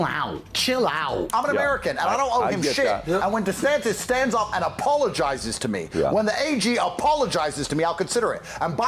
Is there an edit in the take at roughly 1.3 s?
yes; 1 cut; at 1.3 s

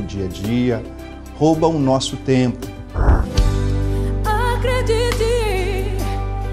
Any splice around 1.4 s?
no; 1 cut; at 3.2 s

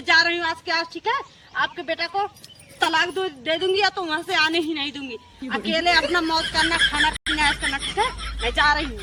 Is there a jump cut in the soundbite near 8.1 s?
no; 0 cuts

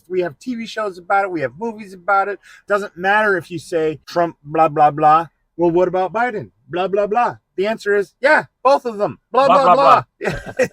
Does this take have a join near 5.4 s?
no; 2 cuts; at 2.6 s, 4.0 s

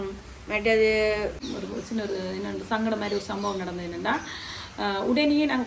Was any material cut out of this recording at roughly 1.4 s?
yes; 1 cut; at 1.4 s

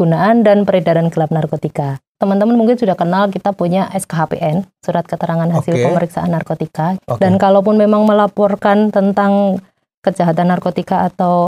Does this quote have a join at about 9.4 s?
no; 2 cuts; at 2.0 s, 7.0 s

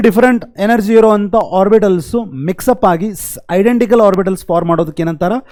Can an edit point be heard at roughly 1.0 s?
no; 0 cuts

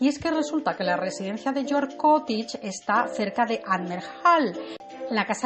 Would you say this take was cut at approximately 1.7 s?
no; 1 cut; at 2.9 s

